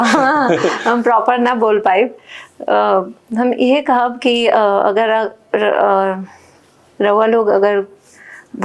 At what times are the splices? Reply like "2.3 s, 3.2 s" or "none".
none

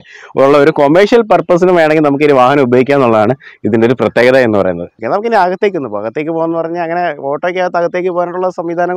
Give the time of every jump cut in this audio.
none

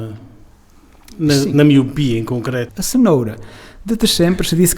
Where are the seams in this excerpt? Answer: 2.8 s

